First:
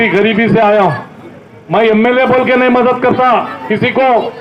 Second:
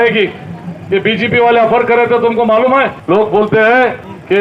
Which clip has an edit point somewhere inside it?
second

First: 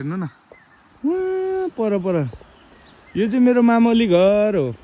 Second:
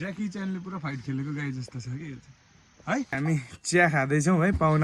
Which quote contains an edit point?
second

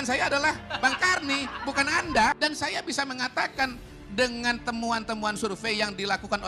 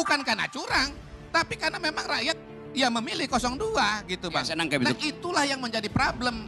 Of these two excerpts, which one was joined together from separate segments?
first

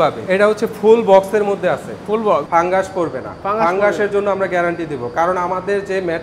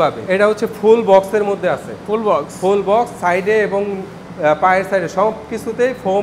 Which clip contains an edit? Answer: first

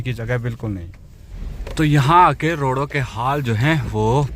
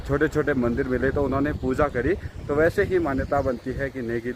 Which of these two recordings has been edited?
first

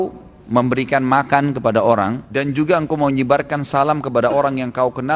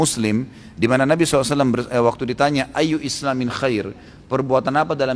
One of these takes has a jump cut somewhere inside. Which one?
first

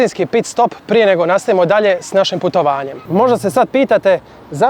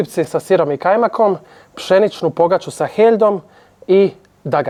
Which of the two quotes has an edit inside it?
first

